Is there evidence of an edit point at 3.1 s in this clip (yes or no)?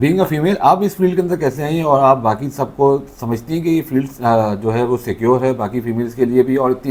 no